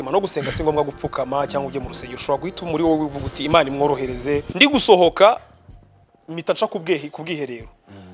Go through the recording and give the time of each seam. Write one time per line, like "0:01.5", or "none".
0:04.5